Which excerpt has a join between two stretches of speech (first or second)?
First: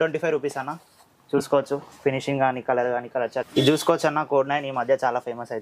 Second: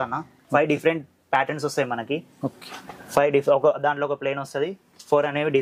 first